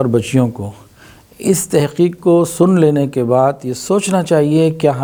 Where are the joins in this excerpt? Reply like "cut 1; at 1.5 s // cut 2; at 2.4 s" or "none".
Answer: none